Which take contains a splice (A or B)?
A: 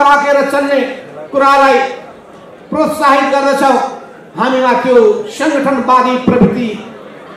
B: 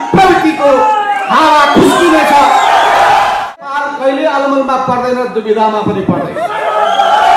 B